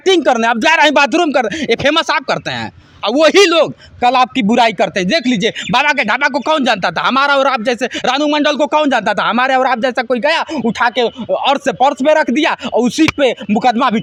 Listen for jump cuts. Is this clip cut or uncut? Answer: uncut